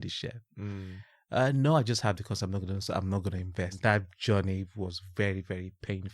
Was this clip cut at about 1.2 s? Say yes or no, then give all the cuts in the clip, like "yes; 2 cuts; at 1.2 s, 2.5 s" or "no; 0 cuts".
no; 1 cut; at 3.8 s